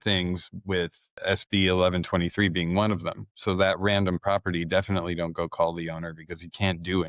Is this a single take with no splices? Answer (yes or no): yes